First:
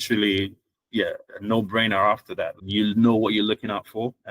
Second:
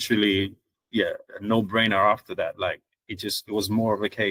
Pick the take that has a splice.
first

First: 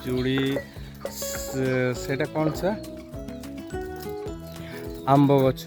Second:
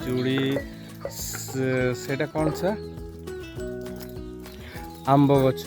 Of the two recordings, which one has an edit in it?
second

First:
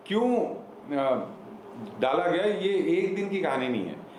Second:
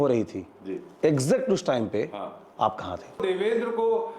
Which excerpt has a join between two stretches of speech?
second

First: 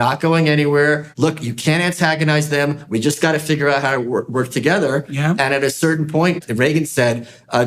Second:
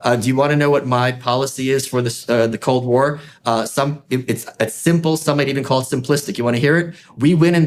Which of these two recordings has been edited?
first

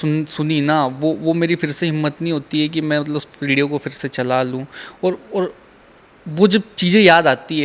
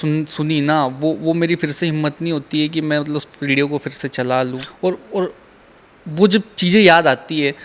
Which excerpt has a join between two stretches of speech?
second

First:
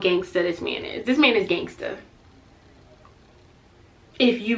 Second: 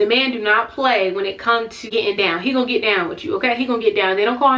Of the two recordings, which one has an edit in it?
second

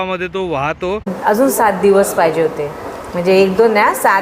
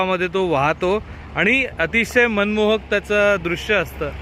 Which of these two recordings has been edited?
first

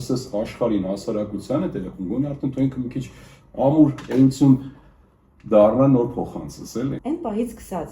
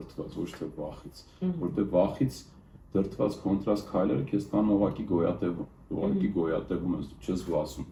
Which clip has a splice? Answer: first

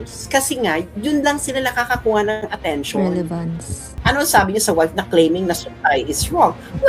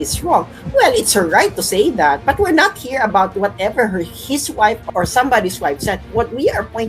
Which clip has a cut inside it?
first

